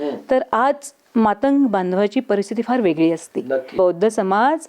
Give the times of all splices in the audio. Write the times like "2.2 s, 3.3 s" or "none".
3.8 s